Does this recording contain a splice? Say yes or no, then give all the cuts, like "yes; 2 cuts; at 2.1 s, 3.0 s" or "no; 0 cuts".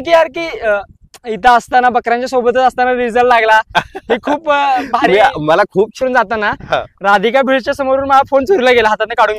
yes; 1 cut; at 5.9 s